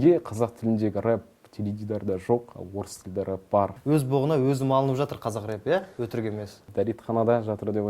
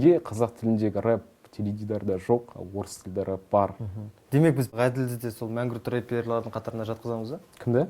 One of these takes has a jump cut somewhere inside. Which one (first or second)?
first